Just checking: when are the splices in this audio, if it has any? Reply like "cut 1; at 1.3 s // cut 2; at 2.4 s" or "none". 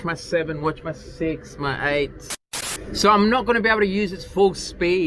cut 1; at 2.4 s

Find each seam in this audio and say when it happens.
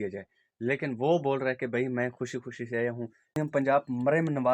cut 1; at 3.4 s

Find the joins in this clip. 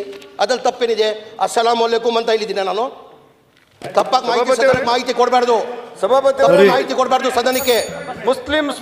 none

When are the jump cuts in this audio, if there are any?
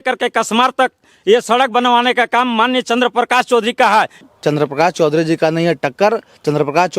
cut 1; at 4.3 s

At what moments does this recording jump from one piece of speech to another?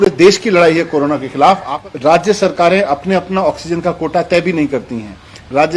cut 1; at 1.7 s

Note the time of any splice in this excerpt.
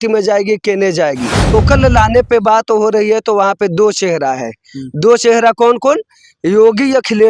cut 1; at 1.5 s

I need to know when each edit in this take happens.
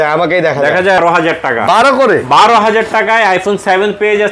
cut 1; at 1.0 s

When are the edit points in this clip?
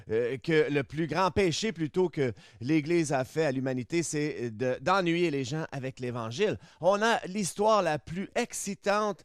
none

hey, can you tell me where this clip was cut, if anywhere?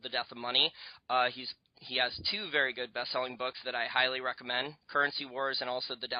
cut 1; at 4.3 s

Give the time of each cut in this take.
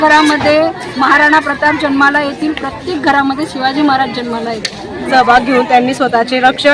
cut 1; at 5.1 s

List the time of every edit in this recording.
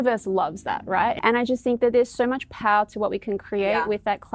cut 1; at 1.2 s

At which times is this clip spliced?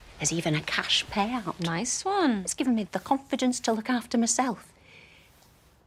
none

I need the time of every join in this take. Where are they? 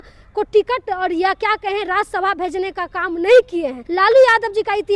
cut 1; at 3.8 s

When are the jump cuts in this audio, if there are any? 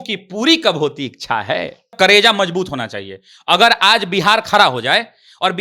cut 1; at 1.9 s

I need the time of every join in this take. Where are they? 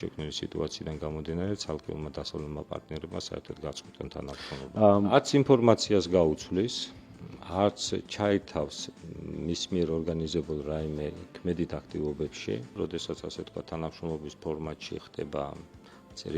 cut 1; at 4.6 s // cut 2; at 12.8 s

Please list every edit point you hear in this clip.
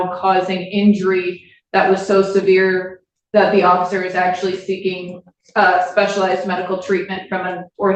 none

